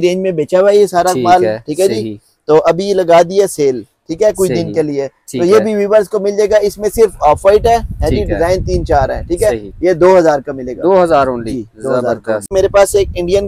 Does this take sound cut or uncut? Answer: cut